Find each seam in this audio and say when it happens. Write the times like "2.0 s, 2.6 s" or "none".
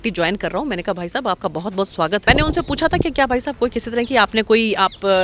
2.2 s

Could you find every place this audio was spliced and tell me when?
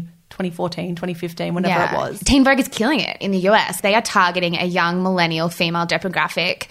2.1 s, 3.7 s

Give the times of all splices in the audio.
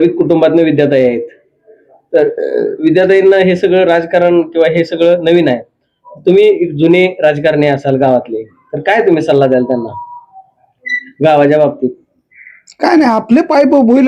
none

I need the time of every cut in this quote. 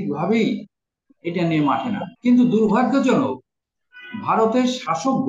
2.1 s

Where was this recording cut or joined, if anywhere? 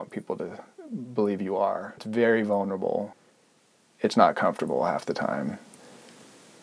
2.0 s, 3.2 s

